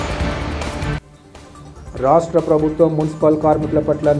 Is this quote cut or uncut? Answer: cut